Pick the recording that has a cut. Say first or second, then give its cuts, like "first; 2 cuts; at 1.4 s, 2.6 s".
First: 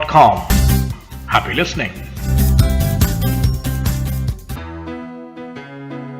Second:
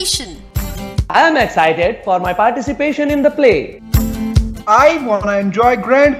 first; 1 cut; at 4.5 s